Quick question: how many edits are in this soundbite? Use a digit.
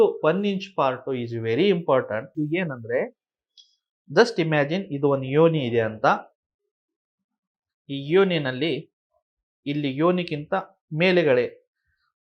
1